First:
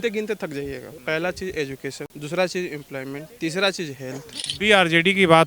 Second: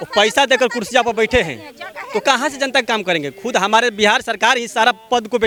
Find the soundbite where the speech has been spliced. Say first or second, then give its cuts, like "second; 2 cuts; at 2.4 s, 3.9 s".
first; 4 cuts; at 0.9 s, 2.1 s, 3.3 s, 4.4 s